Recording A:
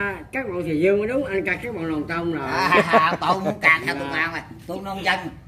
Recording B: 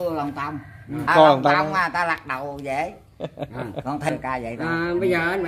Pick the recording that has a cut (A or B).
B